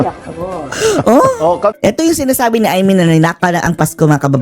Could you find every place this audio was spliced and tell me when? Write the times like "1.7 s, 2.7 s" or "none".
1.8 s